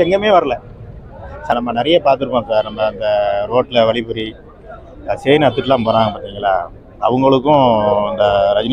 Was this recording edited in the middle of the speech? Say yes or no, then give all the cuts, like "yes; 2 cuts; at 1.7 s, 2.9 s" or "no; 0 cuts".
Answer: yes; 1 cut; at 1.5 s